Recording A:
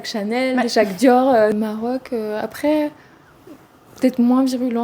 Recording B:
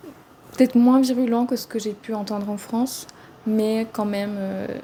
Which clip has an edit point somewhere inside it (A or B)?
A